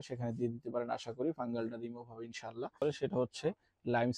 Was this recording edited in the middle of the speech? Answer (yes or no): yes